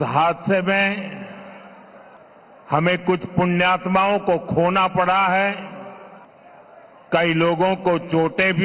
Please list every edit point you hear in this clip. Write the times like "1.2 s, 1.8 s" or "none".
5.1 s